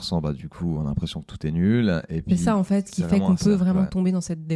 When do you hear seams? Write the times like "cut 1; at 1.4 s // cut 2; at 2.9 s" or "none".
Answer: none